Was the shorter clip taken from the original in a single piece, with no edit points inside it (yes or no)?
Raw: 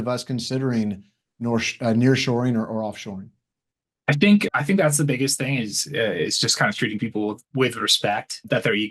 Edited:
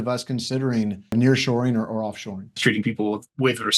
no